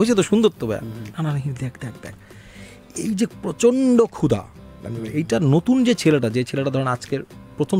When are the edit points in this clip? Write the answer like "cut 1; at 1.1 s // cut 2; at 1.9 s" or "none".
none